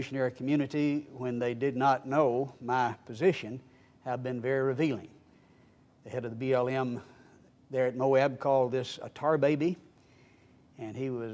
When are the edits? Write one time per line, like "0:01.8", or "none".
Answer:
0:03.1